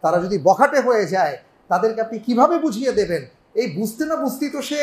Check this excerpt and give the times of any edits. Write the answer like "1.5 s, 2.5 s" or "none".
none

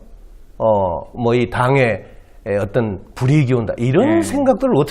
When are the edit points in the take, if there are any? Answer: 3.3 s

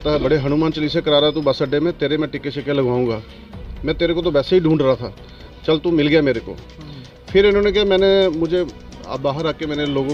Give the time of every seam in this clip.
none

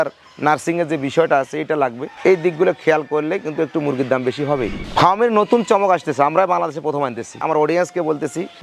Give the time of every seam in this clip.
4.8 s, 7.3 s

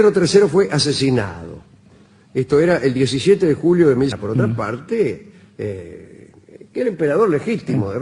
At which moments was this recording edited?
none

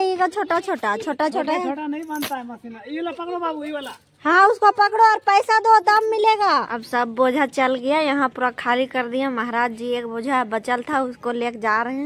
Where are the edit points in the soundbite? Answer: 6.8 s

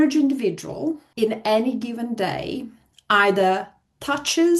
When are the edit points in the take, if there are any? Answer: 1.1 s

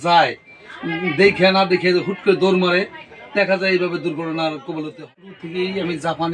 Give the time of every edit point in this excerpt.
5.0 s

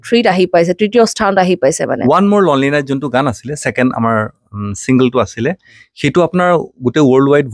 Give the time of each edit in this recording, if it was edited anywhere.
2.0 s

